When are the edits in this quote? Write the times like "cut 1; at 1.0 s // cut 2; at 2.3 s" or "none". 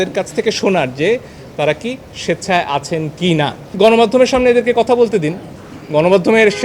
cut 1; at 3.6 s